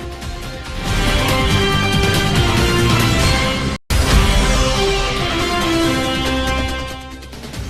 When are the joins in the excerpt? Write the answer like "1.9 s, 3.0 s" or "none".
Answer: none